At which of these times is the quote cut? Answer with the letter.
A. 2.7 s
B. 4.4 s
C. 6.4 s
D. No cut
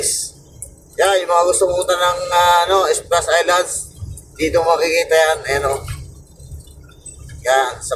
D